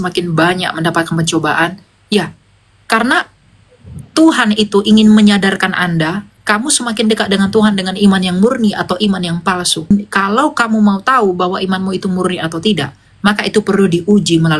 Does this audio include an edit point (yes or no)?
yes